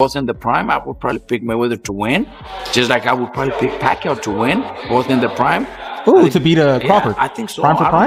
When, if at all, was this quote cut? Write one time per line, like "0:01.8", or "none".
none

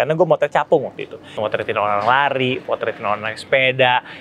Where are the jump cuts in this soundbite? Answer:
0:01.4

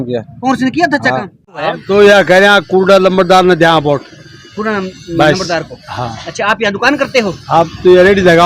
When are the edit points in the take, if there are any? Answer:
0:01.6

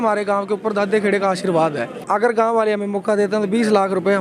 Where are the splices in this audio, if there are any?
0:02.0

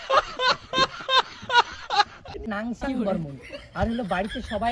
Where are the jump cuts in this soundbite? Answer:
0:01.0
0:02.5

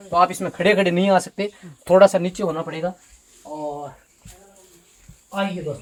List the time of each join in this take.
none

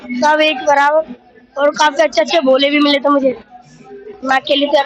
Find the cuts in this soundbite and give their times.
none

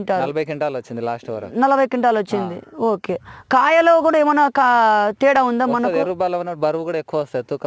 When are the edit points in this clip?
none

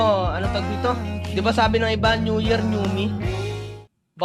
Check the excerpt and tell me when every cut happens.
none

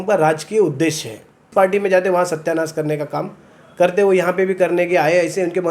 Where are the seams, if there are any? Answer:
0:01.4

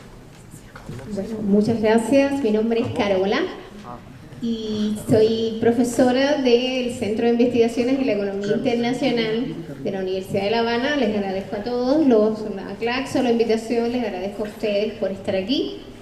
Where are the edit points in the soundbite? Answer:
0:13.6

